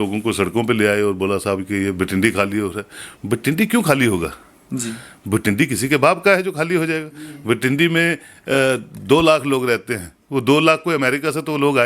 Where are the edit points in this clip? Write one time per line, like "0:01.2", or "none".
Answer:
none